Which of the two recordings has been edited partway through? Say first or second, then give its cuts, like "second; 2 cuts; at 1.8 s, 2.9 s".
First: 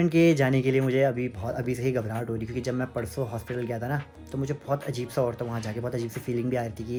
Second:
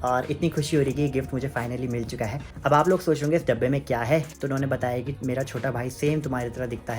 second; 2 cuts; at 2.5 s, 4.3 s